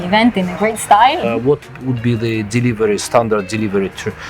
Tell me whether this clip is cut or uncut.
cut